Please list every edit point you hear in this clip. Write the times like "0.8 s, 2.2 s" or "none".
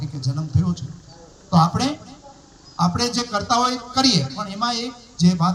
none